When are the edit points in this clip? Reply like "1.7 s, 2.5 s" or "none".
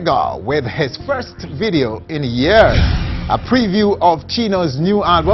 none